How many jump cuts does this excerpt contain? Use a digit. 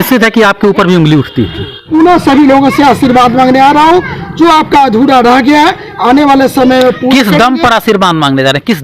1